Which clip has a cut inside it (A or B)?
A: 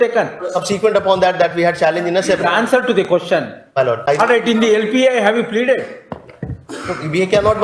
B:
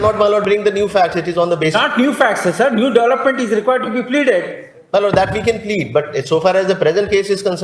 A